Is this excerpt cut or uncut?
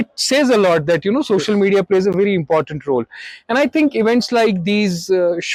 uncut